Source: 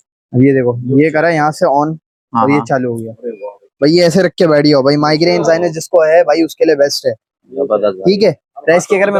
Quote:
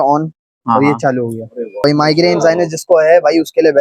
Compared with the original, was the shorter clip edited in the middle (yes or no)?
yes